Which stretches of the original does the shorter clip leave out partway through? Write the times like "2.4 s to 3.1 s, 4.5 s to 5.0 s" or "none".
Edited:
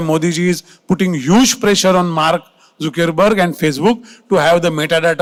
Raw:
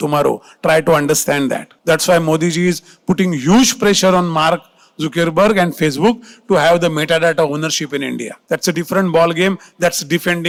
none